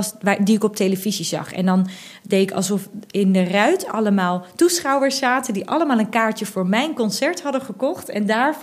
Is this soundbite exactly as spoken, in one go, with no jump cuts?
yes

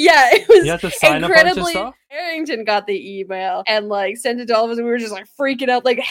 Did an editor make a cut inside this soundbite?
yes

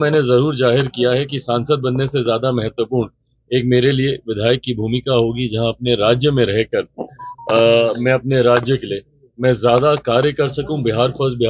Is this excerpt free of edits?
yes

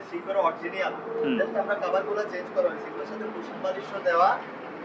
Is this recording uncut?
yes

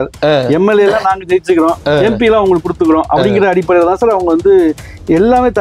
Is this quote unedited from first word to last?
yes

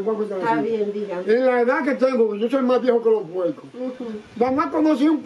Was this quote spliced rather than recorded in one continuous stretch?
no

